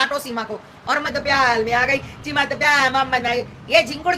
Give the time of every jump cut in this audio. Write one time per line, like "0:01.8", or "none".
0:01.1